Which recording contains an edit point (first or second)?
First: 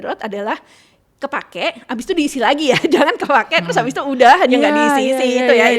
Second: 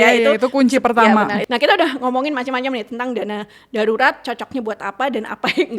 second